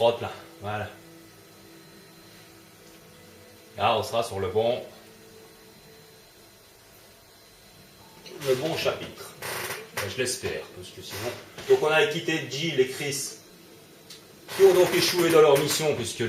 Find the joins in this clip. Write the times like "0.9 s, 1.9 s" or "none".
14.9 s